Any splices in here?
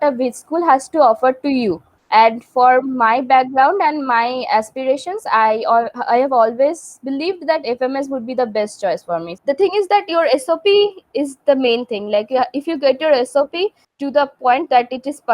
yes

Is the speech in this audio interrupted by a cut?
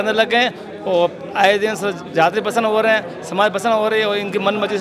no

